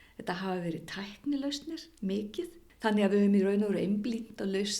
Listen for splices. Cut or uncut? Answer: cut